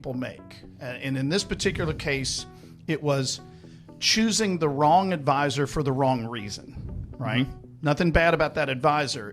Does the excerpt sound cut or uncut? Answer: uncut